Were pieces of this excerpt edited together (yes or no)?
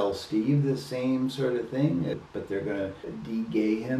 yes